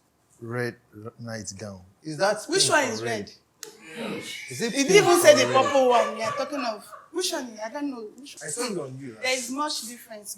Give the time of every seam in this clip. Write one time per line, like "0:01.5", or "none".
0:08.4